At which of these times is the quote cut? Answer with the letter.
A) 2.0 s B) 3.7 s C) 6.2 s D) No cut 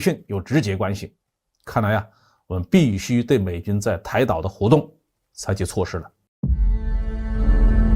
C